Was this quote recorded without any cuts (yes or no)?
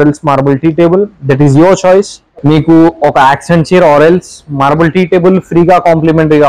no